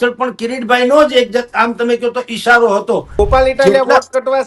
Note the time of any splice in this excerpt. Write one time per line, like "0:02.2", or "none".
0:03.2